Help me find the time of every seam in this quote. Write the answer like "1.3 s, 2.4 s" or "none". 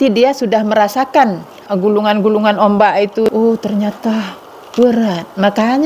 1.5 s, 3.2 s